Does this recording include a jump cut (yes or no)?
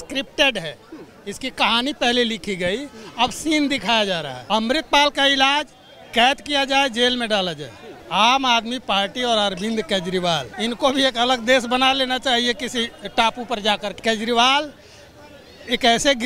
yes